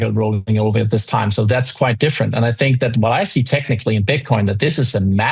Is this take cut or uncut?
uncut